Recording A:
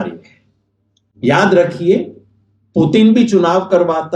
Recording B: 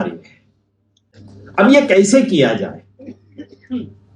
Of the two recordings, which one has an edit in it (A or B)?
B